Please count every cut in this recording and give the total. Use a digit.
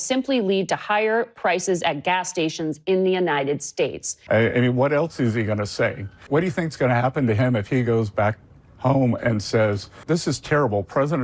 3